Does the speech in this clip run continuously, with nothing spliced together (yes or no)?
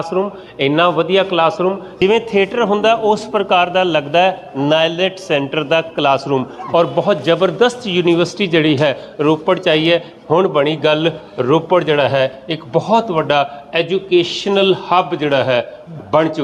yes